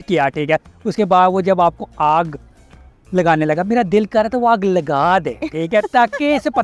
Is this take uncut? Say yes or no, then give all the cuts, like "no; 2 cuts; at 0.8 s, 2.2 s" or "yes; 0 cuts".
yes; 0 cuts